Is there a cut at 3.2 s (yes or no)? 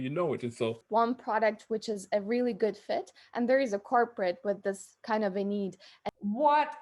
no